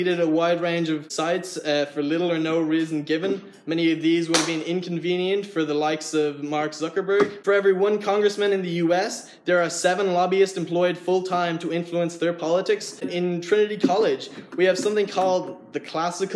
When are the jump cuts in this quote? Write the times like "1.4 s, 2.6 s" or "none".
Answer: 1.1 s, 7.4 s, 13.1 s

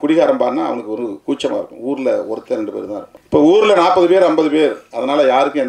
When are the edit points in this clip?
3.1 s

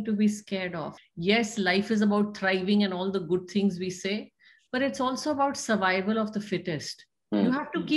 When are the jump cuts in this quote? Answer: 0.9 s

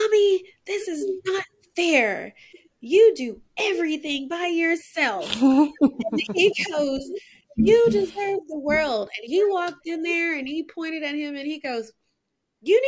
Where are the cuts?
none

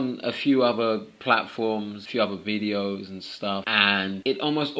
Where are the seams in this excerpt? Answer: 2.0 s

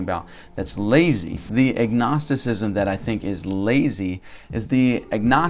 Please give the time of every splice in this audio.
1.4 s

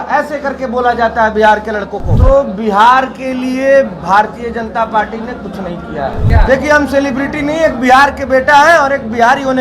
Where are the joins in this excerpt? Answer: 2.0 s, 6.3 s

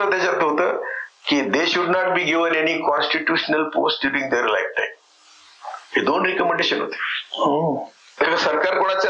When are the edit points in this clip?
8.2 s

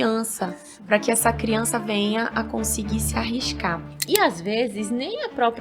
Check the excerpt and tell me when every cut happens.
3.9 s

